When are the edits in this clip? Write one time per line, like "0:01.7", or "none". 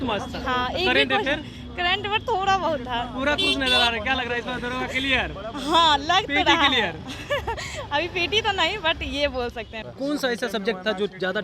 0:09.8